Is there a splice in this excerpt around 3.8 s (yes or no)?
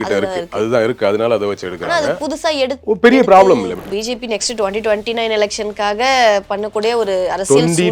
yes